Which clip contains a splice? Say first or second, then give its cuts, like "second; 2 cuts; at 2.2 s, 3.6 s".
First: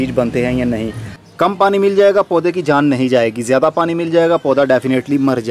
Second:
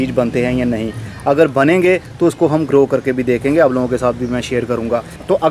first; 1 cut; at 1.1 s